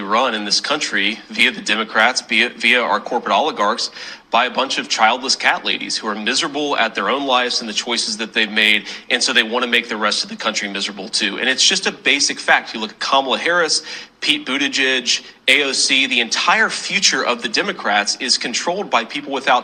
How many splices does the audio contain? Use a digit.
0